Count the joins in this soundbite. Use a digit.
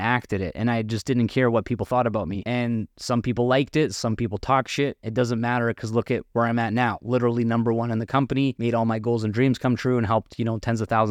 2